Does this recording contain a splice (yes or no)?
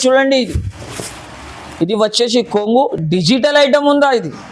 no